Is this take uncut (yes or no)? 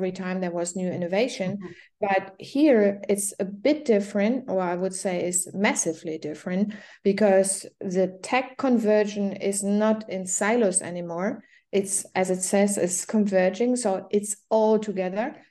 yes